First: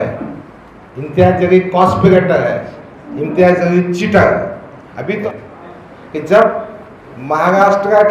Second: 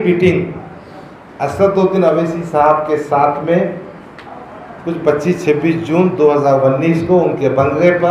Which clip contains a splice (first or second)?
first